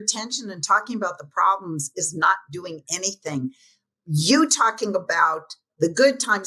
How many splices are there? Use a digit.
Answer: 0